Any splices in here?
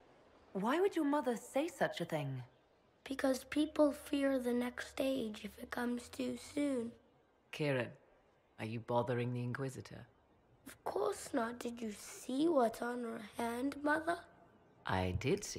no; 0 cuts

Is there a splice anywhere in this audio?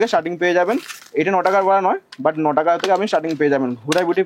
no; 0 cuts

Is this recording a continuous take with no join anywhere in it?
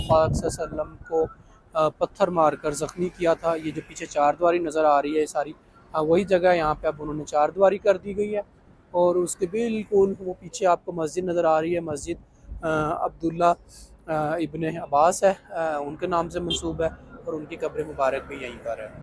yes; 0 cuts

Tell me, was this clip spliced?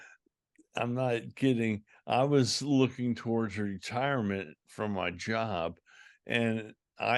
no; 0 cuts

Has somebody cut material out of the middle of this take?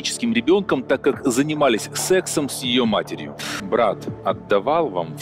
yes; 1 cut; at 3.5 s

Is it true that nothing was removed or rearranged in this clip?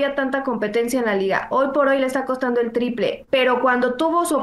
yes; 0 cuts

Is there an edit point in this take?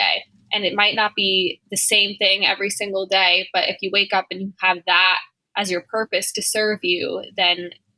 no; 0 cuts

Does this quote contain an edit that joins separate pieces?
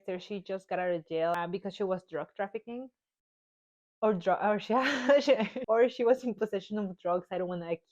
yes; 2 cuts; at 1.4 s, 5.5 s

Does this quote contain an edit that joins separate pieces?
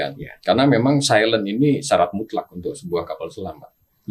no; 0 cuts

